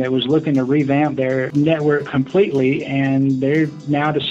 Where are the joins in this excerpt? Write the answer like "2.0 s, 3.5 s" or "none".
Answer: 1.5 s